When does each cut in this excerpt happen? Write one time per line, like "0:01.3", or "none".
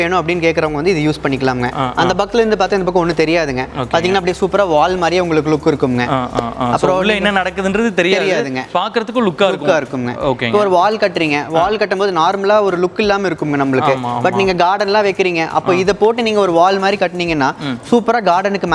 none